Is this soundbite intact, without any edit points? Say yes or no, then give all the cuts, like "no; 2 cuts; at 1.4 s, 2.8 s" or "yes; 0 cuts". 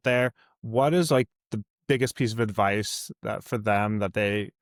yes; 0 cuts